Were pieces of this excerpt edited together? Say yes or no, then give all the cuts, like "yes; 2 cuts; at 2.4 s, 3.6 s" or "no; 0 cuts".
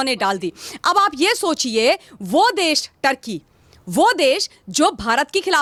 no; 0 cuts